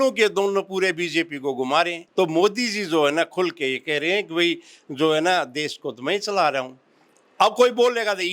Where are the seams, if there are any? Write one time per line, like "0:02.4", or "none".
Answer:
0:02.0